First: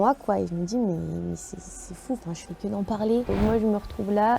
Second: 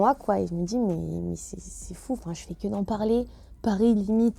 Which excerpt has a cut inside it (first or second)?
first